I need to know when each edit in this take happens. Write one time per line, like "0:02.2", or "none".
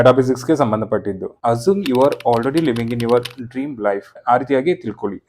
0:01.3
0:04.1